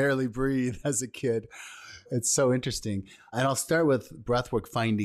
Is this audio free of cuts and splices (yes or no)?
no